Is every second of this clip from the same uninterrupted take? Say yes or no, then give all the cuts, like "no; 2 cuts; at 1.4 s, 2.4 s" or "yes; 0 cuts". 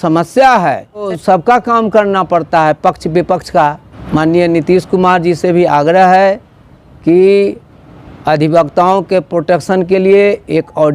no; 2 cuts; at 1.1 s, 3.9 s